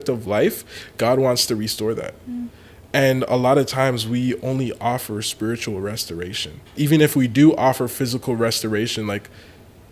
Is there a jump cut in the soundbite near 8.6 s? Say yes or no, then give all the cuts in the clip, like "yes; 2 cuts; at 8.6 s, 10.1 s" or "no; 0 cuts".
no; 1 cut; at 6.8 s